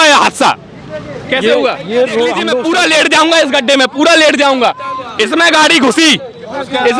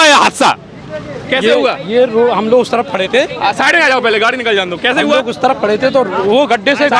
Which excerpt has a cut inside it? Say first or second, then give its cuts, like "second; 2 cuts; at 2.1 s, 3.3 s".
first; 1 cut; at 2.5 s